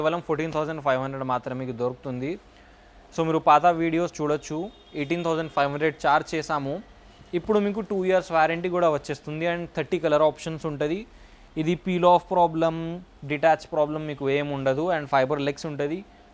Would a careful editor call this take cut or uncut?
uncut